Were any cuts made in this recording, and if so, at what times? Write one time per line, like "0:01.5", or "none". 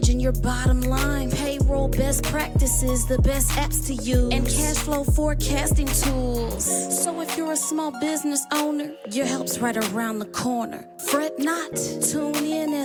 none